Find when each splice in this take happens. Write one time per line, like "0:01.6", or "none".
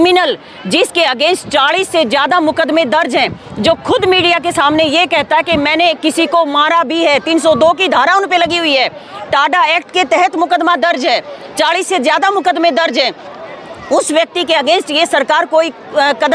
none